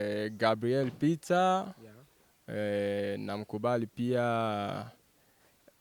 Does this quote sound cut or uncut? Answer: uncut